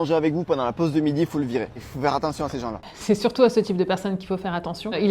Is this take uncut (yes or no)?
no